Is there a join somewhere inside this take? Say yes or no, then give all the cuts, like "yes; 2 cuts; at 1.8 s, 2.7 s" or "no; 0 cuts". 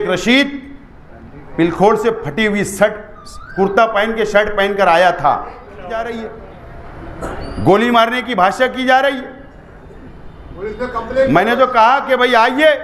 yes; 1 cut; at 6.1 s